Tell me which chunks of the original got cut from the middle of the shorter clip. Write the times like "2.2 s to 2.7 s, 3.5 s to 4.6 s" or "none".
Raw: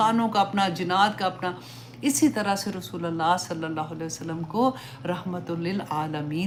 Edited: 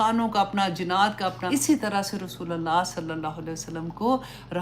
1.4 s to 1.9 s